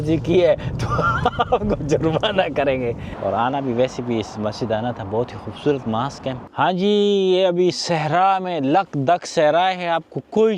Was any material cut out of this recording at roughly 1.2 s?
no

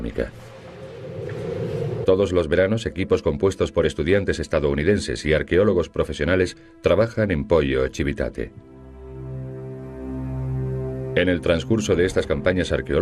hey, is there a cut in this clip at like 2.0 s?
no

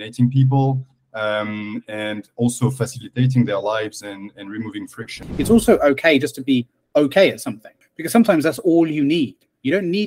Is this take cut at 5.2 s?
yes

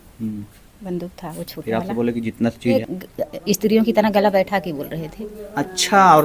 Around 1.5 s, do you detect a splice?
no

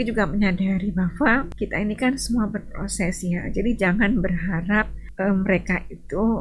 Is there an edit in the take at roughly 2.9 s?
no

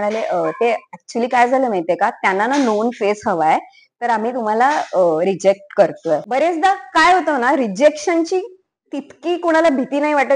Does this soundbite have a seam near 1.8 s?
no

